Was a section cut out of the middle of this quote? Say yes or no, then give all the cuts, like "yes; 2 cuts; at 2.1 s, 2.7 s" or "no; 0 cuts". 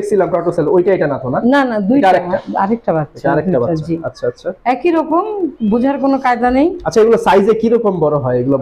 no; 0 cuts